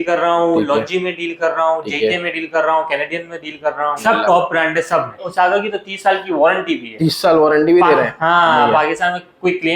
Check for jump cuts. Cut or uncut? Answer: cut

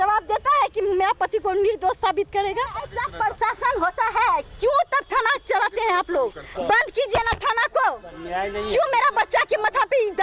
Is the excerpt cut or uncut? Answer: cut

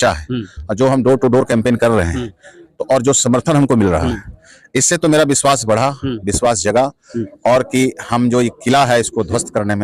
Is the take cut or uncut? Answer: uncut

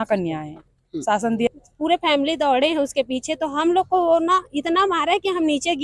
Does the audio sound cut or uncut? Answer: cut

